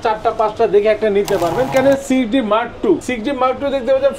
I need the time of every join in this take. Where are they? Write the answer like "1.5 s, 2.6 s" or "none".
1.7 s, 3.1 s

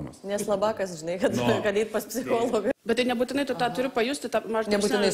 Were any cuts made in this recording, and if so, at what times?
2.7 s

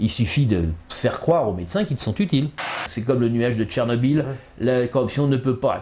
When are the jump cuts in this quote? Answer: 2.9 s

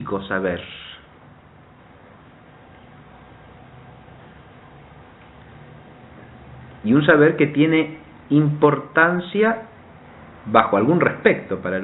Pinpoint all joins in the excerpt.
5.1 s

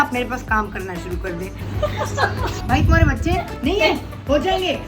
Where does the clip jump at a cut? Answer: 1.6 s, 2.6 s

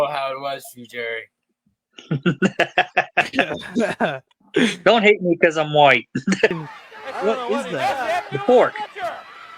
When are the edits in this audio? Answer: 6.5 s

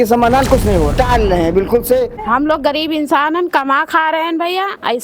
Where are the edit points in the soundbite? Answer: 0.9 s, 2.1 s

